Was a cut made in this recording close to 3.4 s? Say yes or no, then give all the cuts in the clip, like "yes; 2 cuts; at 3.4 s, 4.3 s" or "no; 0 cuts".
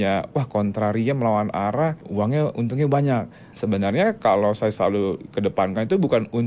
yes; 2 cuts; at 2.0 s, 3.4 s